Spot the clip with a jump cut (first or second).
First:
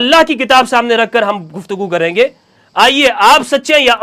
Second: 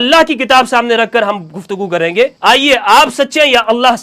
second